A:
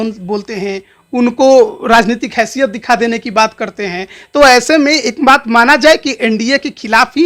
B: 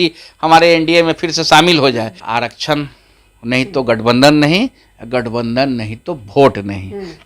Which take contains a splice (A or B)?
B